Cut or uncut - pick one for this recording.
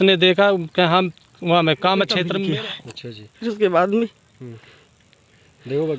cut